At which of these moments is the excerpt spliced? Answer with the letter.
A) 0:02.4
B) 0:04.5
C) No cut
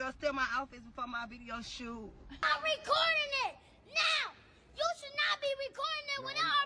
A